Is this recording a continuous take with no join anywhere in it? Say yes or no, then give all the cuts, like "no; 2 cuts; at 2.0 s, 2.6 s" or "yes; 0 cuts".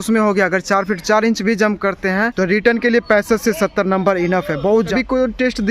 no; 2 cuts; at 2.3 s, 4.9 s